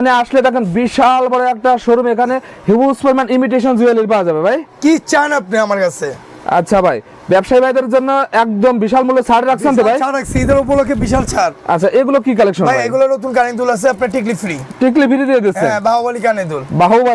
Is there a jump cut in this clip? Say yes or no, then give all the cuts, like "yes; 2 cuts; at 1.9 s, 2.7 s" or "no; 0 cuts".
no; 0 cuts